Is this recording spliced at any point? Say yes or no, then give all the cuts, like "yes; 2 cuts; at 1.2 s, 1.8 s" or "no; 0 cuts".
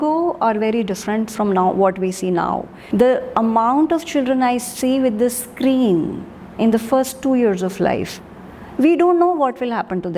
yes; 1 cut; at 2.7 s